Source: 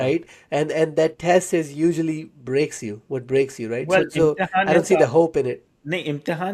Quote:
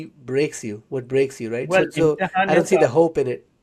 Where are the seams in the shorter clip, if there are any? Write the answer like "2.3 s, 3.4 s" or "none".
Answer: none